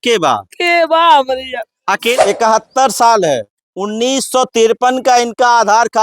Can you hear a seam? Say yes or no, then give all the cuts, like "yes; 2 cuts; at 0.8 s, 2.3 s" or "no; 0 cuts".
yes; 1 cut; at 2.2 s